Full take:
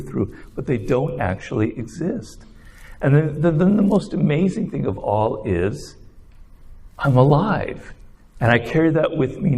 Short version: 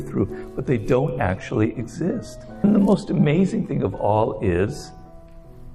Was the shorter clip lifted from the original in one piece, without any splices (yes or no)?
no